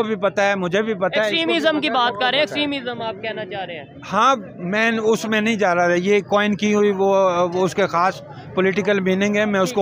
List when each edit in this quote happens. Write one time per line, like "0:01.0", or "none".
none